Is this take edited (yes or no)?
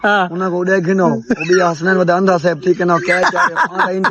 no